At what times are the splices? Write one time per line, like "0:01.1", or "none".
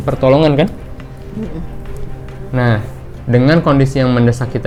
none